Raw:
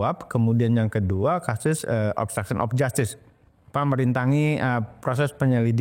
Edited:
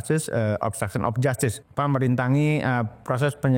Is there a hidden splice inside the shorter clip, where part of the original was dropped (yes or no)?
yes